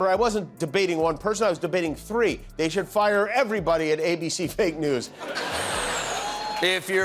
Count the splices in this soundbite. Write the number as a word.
one